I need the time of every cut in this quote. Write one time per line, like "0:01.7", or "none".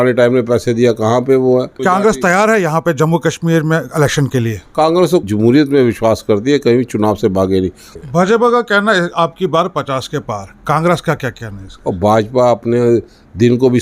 0:01.7
0:07.9